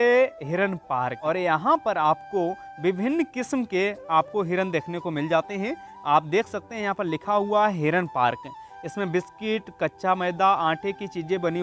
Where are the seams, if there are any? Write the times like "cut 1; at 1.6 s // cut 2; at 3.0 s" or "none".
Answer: cut 1; at 1.2 s